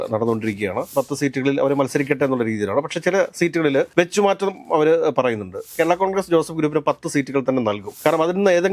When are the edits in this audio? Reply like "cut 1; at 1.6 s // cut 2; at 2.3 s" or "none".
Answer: cut 1; at 0.9 s // cut 2; at 5.7 s